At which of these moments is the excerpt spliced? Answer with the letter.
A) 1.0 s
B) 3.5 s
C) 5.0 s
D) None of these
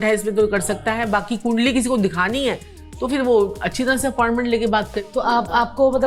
D